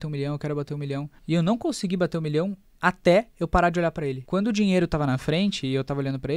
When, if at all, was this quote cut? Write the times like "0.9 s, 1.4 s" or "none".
1.1 s, 4.2 s